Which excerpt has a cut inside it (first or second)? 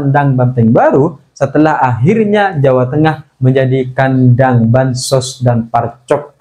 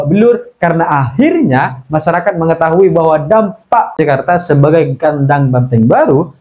second